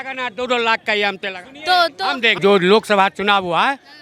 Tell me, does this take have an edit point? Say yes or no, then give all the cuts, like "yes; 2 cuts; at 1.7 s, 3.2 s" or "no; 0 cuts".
yes; 1 cut; at 2.4 s